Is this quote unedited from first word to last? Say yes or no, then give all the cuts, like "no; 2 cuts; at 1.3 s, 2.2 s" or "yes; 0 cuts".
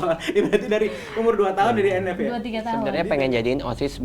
no; 1 cut; at 2.9 s